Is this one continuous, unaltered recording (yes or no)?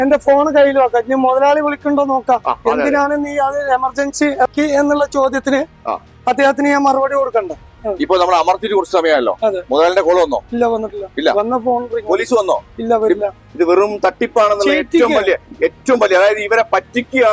no